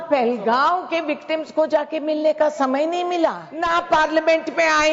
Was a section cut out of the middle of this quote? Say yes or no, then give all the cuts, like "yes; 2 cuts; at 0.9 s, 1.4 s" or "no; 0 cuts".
yes; 1 cut; at 3.5 s